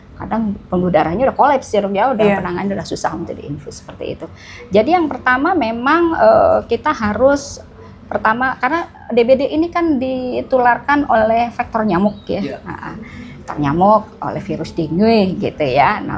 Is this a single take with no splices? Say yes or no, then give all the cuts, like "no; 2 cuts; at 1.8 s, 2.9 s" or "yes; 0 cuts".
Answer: yes; 0 cuts